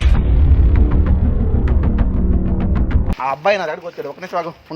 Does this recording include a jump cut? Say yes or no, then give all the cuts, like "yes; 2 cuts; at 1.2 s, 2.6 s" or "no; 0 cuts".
yes; 1 cut; at 3.1 s